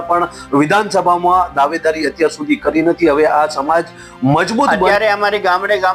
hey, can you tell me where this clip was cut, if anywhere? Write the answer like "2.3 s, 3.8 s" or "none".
4.8 s